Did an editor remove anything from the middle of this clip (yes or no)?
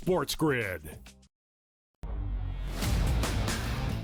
no